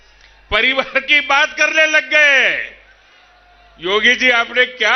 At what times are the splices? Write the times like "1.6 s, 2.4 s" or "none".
none